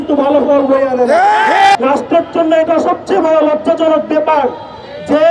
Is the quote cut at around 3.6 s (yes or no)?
no